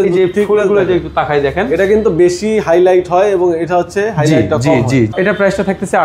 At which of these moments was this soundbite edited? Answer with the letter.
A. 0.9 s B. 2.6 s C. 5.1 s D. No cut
C